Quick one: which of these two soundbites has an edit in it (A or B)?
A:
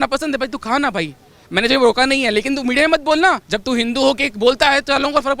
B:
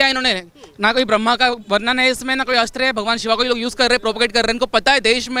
A